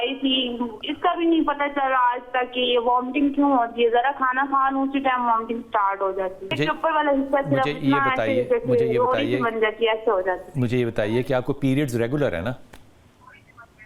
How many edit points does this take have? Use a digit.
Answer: 1